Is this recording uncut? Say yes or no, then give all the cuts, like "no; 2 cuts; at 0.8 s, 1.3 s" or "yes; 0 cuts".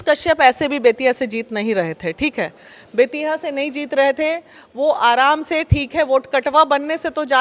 yes; 0 cuts